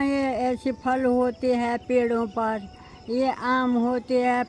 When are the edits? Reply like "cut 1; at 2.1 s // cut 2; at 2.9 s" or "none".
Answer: none